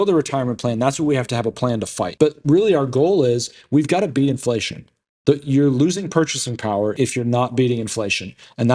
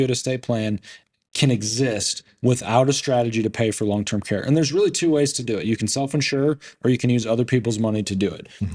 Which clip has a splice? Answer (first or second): first